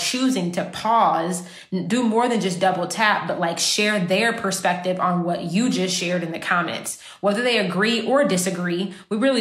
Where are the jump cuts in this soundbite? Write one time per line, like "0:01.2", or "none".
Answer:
none